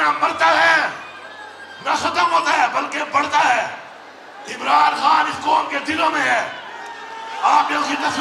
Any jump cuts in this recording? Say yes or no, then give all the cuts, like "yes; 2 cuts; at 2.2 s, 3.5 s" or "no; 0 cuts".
no; 0 cuts